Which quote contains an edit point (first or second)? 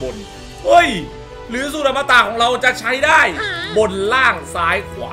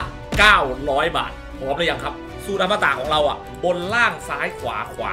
second